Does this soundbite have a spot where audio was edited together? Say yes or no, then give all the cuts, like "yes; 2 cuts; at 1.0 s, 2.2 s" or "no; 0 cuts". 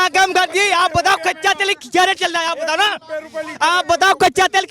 no; 0 cuts